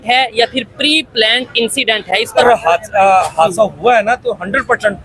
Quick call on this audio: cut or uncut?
cut